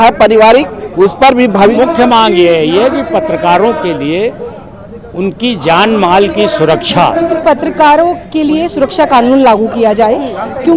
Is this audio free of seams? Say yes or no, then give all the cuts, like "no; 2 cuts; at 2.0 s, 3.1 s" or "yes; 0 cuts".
no; 2 cuts; at 1.7 s, 7.4 s